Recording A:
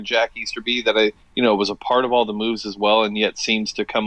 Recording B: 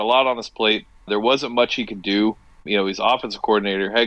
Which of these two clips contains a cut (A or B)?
B